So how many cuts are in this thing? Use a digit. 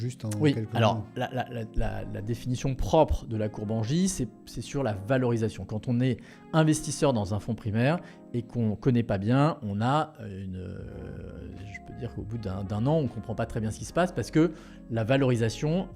0